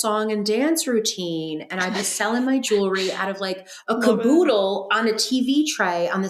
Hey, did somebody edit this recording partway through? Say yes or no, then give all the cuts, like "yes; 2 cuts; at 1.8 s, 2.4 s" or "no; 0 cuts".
no; 0 cuts